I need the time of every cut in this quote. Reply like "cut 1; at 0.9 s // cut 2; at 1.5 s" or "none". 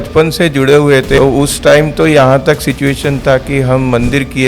cut 1; at 1.2 s